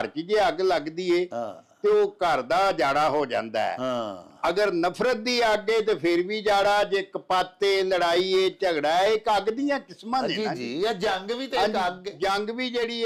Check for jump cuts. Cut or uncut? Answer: uncut